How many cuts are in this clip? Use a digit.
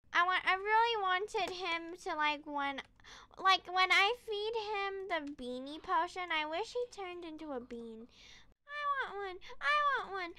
1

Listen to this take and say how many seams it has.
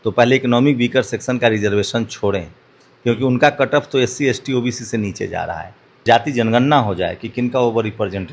1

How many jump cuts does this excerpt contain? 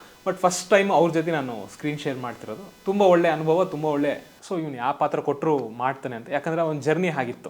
1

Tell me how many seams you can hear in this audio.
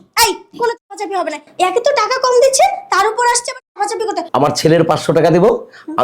1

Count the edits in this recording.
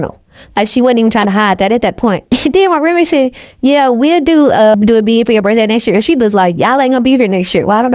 1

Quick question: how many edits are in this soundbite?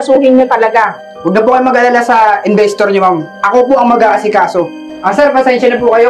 2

